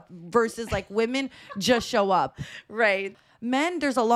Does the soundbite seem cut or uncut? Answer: cut